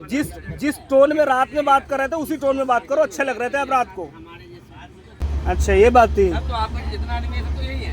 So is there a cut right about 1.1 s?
no; 1 cut; at 5.2 s

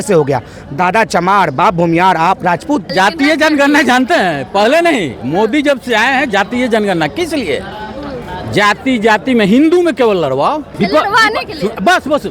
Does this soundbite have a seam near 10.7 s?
yes; 2 cuts; at 2.9 s, 10.7 s

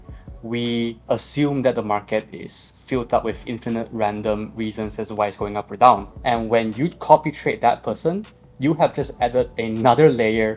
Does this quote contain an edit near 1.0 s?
yes; 2 cuts; at 1.0 s, 6.1 s

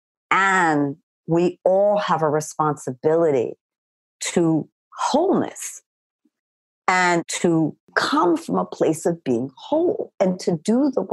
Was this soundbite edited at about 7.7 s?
yes; 2 cuts; at 6.2 s, 7.7 s

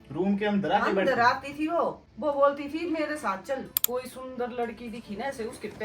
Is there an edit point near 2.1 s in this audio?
yes; 2 cuts; at 2.1 s, 3.7 s

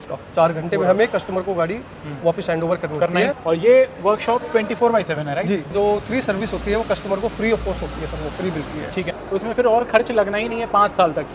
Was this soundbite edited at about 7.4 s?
no; 3 cuts; at 3.3 s, 5.7 s, 9.2 s

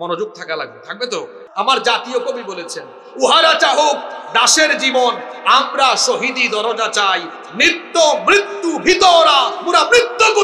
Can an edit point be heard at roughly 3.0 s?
no; 1 cut; at 1.4 s

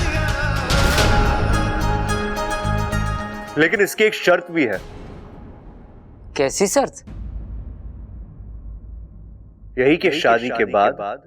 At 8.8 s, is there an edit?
no; 1 cut; at 3.4 s

